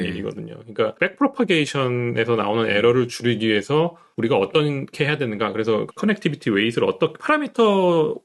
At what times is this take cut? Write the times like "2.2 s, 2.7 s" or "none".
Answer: 1.0 s, 4.0 s, 5.9 s